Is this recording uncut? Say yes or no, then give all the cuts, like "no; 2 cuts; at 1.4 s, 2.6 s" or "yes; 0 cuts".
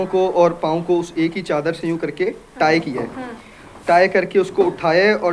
yes; 0 cuts